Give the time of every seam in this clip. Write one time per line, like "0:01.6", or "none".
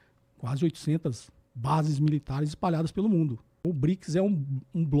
0:03.5